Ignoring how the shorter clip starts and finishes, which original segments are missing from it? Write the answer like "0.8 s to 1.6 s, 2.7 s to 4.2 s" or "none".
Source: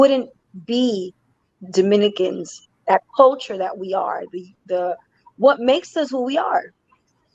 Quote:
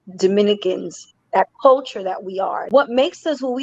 4.2 s to 5.4 s

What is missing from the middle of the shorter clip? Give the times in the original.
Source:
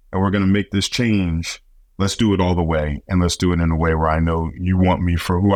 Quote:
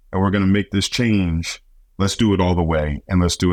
none

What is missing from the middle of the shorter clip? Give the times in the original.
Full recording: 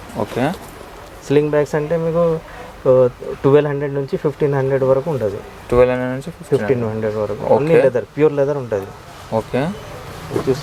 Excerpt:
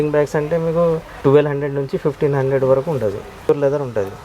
2.5 s to 3.3 s, 5.7 s to 8.3 s

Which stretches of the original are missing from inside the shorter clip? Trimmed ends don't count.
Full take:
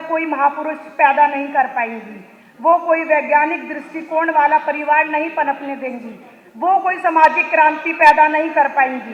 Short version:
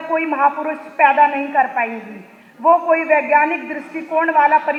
none

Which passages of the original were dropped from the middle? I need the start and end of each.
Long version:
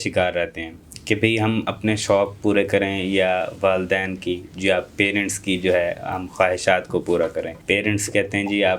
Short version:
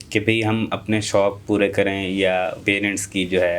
3.5 s to 4.9 s

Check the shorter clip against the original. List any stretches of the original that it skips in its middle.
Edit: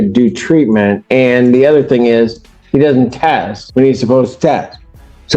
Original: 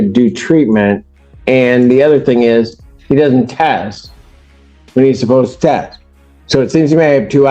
1.0 s to 1.4 s, 3.9 s to 4.8 s

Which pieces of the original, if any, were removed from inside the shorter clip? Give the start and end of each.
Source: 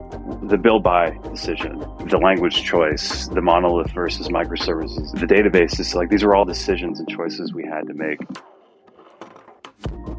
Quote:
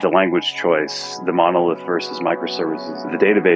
none

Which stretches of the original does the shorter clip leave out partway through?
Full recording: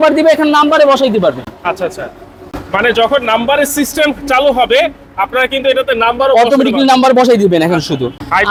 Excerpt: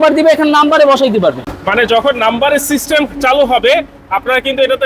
1.5 s to 2.6 s

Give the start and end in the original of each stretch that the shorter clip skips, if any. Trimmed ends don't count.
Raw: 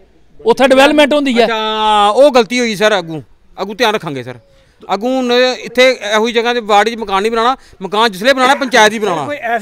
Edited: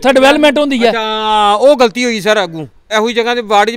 3.4 s to 6.0 s

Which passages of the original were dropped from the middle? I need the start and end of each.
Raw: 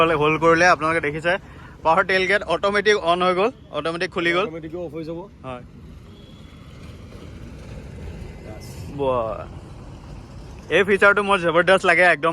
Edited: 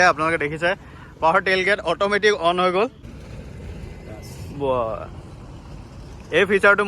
3.6 s to 7.4 s

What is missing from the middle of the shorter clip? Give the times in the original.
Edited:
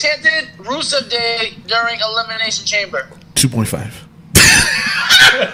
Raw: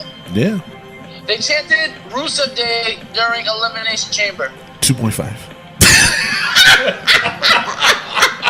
none

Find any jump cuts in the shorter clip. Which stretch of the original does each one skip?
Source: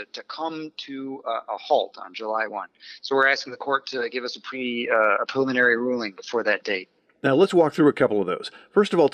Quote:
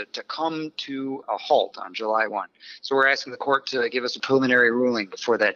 1.2 s to 1.4 s, 4.4 s to 5.3 s

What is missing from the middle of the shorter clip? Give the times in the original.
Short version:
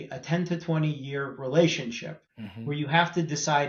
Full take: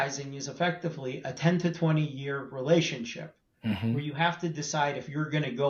3.5 s to 3.6 s

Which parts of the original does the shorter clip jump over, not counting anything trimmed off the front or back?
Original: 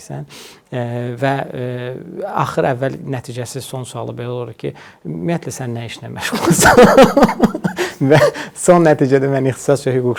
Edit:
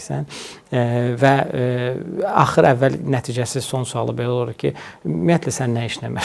none

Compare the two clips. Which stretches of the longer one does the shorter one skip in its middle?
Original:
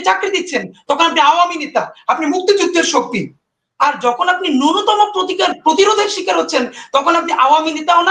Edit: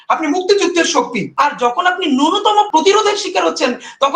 3.2 s to 3.6 s, 5.1 s to 5.6 s

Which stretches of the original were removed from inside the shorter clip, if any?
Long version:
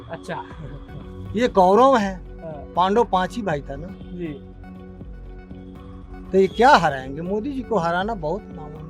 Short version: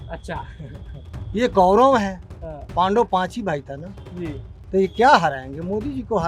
4.5 s to 6.1 s

